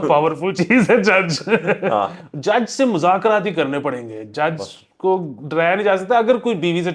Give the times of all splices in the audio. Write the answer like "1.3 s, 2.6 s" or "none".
none